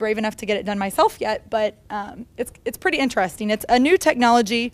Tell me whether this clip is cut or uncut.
cut